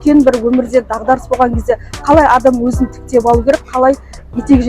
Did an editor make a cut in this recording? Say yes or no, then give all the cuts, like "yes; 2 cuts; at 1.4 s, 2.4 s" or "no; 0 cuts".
no; 0 cuts